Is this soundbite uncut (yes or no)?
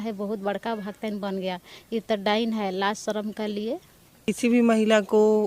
no